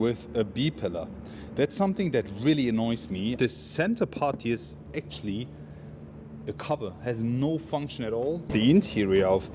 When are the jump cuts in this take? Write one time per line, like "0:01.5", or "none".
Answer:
0:03.4
0:08.5